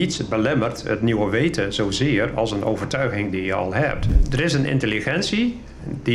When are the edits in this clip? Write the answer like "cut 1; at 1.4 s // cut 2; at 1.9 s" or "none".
cut 1; at 4.1 s

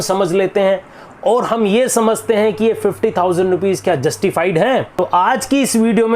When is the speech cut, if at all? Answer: cut 1; at 4.9 s

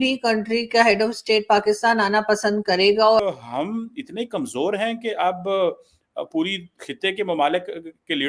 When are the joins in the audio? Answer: cut 1; at 3.2 s

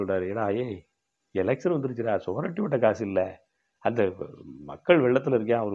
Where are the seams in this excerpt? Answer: none

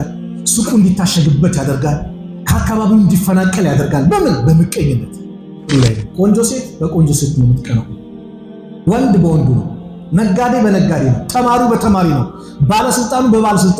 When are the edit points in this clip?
cut 1; at 5.6 s

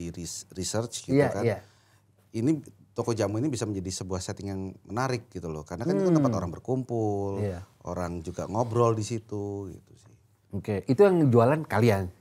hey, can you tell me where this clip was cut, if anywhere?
none

